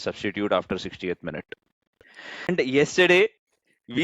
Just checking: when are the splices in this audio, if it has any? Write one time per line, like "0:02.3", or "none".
0:02.5